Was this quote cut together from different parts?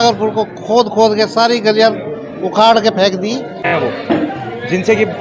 yes; 1 cut; at 3.7 s

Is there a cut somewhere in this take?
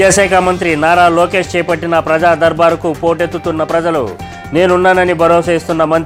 no; 0 cuts

